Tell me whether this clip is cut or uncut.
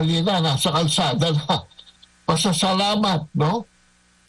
cut